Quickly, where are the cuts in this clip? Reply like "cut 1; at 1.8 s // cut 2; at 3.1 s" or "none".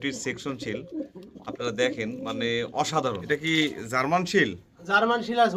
cut 1; at 3.2 s